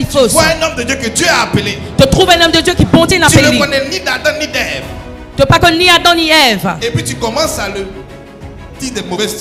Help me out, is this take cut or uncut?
uncut